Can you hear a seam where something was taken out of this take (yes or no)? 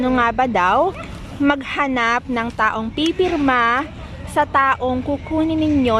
no